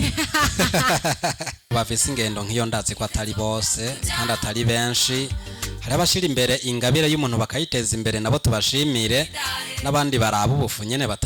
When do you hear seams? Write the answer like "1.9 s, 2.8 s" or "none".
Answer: 1.6 s